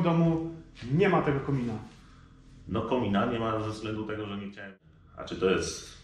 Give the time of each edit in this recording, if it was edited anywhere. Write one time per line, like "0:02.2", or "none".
0:04.6